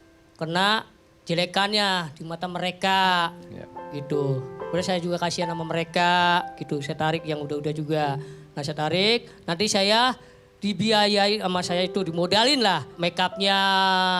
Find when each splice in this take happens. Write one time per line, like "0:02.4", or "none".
0:12.9